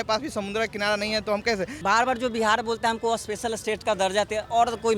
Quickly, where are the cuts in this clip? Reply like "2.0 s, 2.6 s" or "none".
1.7 s

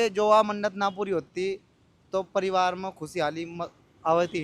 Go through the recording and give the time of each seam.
none

